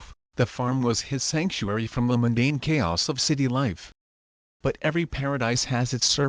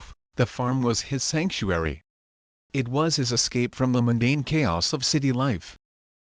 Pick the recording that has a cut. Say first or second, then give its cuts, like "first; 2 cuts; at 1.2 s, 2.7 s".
first; 2 cuts; at 2.1 s, 5.4 s